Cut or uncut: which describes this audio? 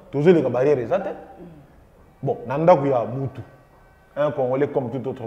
uncut